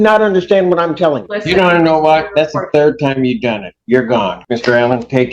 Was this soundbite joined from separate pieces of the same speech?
yes; 2 cuts; at 1.3 s, 4.4 s

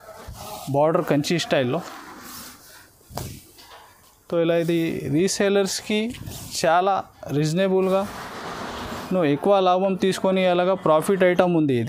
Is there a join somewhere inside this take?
no; 0 cuts

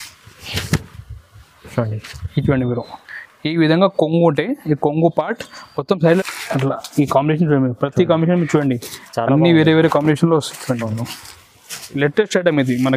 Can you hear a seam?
yes; 2 cuts; at 6.2 s, 12.0 s

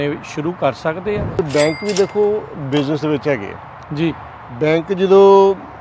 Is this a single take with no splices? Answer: no; 1 cut; at 1.4 s

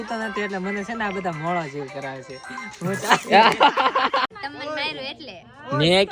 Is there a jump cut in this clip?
yes; 1 cut; at 4.3 s

